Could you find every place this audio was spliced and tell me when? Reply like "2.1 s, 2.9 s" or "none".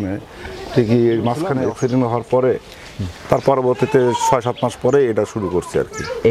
1.5 s